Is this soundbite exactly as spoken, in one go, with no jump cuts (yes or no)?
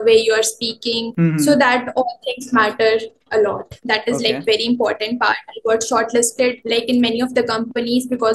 no